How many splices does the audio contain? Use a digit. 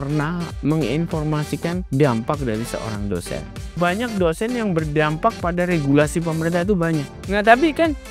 3